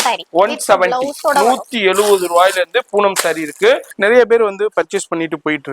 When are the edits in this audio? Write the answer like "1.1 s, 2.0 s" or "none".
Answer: 3.9 s

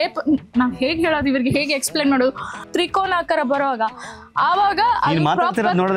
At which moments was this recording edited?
2.6 s

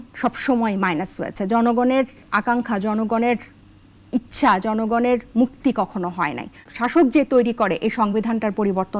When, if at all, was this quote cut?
6.6 s

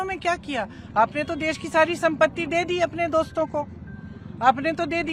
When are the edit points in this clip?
none

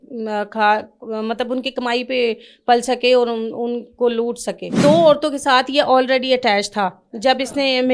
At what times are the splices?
4.8 s

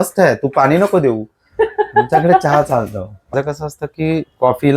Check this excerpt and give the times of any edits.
3.3 s

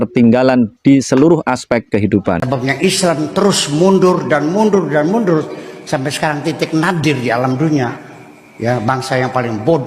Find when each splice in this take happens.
2.4 s

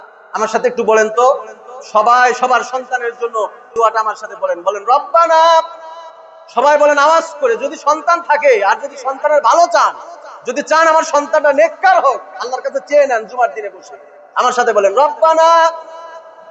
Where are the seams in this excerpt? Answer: 3.7 s

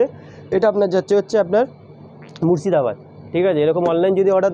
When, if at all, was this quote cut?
none

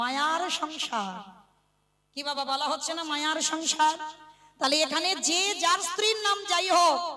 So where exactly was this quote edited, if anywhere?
none

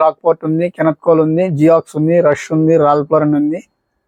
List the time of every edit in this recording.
none

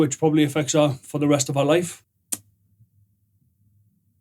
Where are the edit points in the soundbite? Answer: 2.0 s

